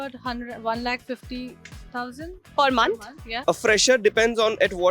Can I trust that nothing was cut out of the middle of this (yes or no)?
no